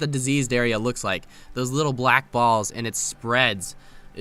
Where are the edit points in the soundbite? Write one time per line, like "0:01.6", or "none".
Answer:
none